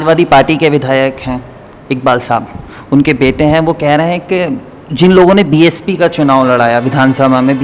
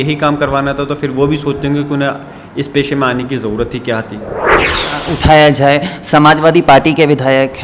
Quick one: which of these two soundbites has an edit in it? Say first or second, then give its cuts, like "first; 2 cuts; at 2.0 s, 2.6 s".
second; 1 cut; at 4.5 s